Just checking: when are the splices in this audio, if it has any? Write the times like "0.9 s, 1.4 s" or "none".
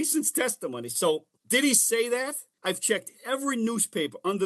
1.3 s, 2.4 s